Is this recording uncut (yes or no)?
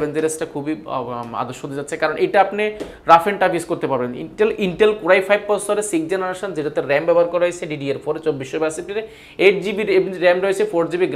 yes